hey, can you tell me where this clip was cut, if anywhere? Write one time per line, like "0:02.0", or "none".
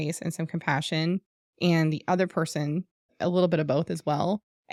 none